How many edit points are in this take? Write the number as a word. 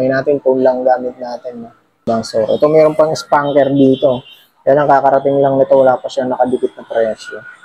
one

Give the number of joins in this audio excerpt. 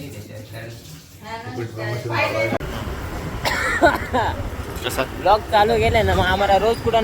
one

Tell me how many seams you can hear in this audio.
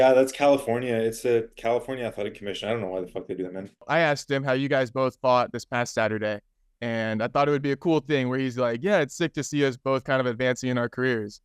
one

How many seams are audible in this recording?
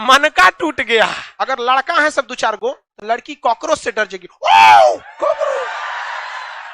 one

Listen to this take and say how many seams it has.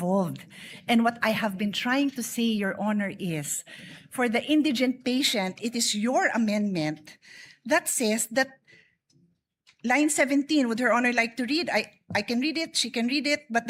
zero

